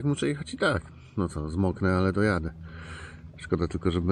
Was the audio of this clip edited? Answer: no; 0 cuts

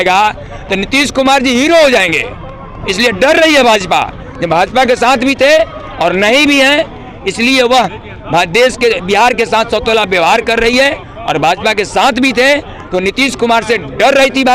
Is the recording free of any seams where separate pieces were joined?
yes; 0 cuts

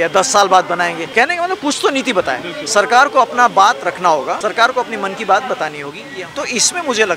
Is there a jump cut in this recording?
yes; 3 cuts; at 1.0 s, 4.4 s, 5.9 s

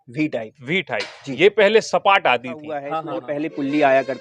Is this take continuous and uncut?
no; 1 cut; at 3.0 s

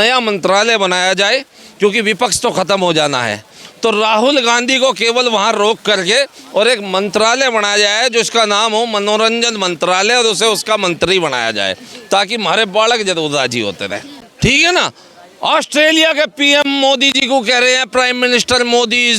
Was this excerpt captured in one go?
no; 1 cut; at 14.2 s

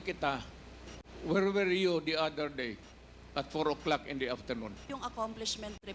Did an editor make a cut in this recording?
yes; 1 cut; at 4.9 s

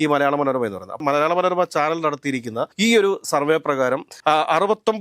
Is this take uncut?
yes; 0 cuts

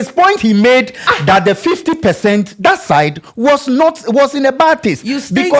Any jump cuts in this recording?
no; 0 cuts

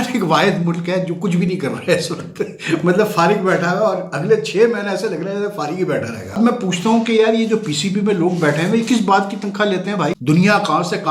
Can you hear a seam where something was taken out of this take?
yes; 2 cuts; at 6.4 s, 10.2 s

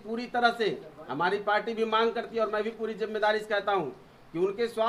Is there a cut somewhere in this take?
no; 0 cuts

